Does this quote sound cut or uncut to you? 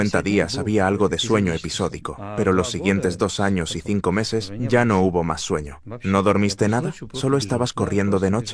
uncut